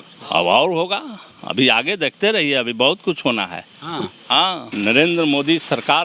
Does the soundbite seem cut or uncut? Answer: cut